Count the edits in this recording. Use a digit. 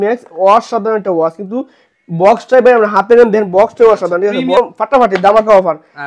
1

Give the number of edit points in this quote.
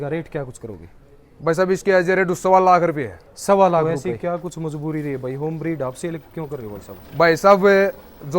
1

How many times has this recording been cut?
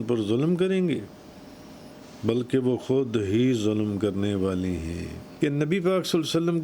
1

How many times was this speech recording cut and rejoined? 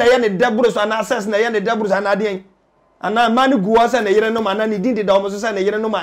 0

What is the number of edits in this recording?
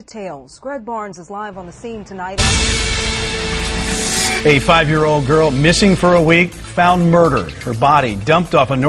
1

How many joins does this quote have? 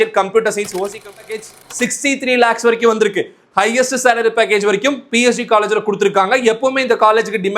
1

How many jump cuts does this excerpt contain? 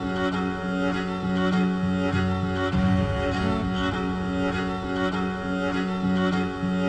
0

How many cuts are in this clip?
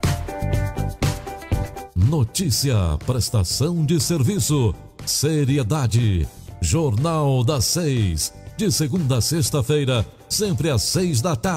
1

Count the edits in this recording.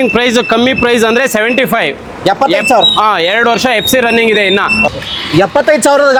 0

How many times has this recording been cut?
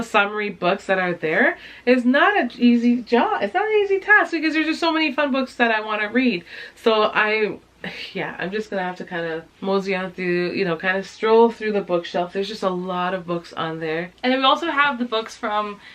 0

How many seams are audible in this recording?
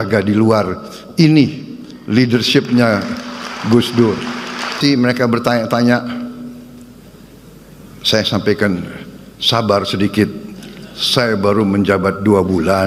1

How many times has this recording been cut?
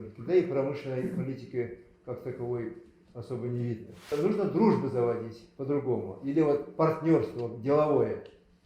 1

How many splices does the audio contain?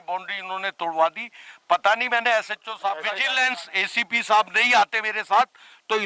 1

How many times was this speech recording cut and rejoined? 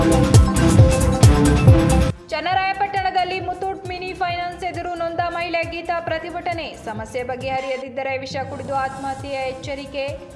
0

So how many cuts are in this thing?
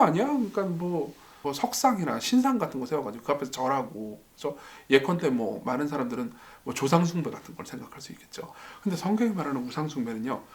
1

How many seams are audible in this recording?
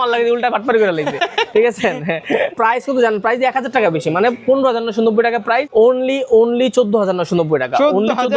2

